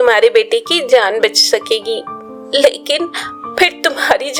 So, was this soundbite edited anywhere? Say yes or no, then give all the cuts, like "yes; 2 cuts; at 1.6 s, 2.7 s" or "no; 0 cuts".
no; 0 cuts